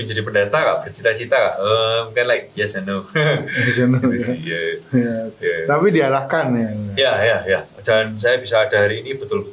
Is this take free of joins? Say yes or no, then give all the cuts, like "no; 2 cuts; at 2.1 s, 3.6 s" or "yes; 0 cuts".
yes; 0 cuts